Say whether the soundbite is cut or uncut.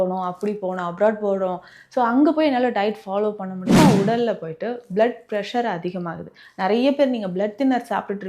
cut